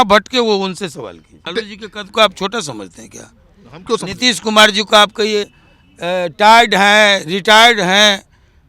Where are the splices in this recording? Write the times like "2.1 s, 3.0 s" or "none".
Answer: 1.5 s